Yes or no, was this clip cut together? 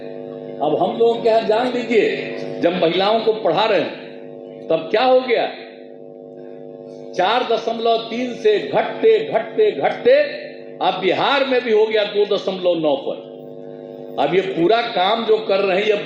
no